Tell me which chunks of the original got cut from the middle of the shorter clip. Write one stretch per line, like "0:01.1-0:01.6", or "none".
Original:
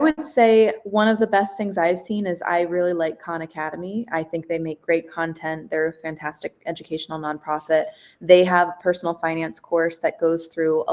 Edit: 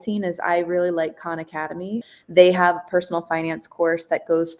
0:04.1-0:08.0